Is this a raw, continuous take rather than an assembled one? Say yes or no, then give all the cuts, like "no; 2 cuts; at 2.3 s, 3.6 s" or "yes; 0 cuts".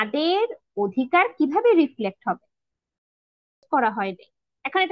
no; 1 cut; at 3.1 s